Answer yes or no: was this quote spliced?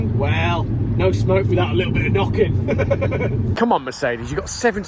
yes